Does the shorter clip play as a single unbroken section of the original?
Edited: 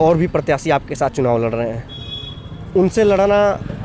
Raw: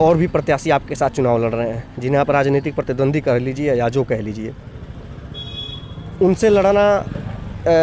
no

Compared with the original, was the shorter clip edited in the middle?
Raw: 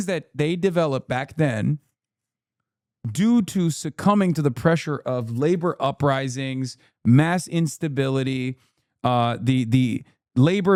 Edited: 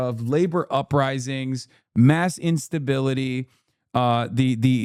no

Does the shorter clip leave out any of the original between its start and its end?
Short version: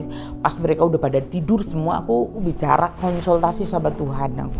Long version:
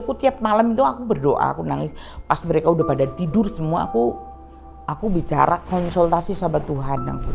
yes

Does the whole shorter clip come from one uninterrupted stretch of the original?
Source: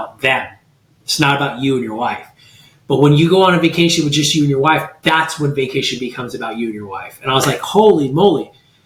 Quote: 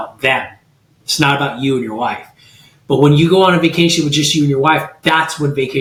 yes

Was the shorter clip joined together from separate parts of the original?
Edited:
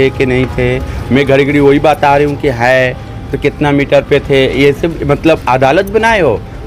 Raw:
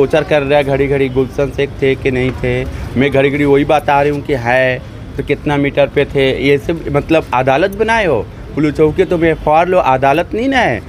no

